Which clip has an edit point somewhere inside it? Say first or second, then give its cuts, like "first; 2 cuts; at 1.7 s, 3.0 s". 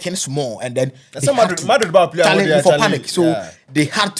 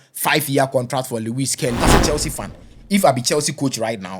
second; 1 cut; at 1.8 s